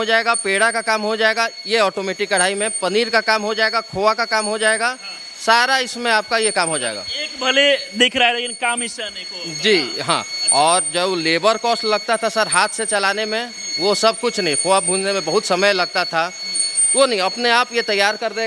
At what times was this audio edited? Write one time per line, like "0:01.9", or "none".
none